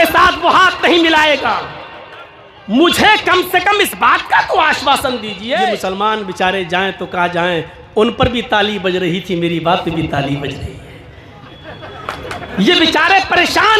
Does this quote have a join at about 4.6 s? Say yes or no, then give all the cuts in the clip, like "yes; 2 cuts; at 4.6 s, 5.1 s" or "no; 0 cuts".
no; 1 cut; at 5.8 s